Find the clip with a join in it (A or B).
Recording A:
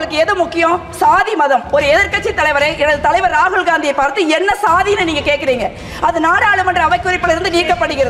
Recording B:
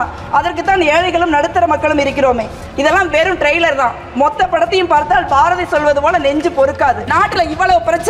B